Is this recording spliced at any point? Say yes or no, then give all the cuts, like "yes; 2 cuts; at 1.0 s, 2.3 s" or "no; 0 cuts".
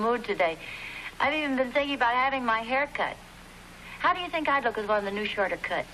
no; 0 cuts